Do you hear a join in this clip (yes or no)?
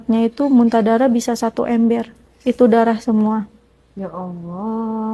no